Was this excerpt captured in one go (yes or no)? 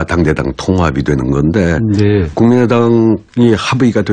no